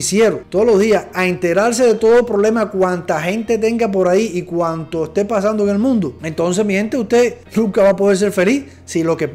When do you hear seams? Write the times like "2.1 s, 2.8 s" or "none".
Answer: none